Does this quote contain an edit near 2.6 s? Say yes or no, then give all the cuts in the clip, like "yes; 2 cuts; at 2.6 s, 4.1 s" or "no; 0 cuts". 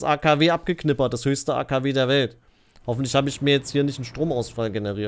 no; 0 cuts